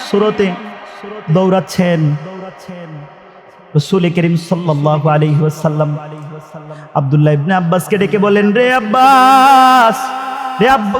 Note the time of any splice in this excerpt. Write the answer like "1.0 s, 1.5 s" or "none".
none